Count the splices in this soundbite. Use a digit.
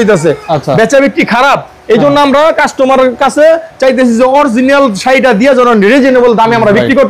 0